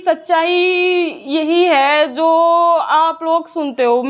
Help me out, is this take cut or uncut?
uncut